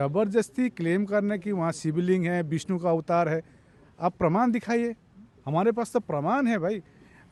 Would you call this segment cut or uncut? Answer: uncut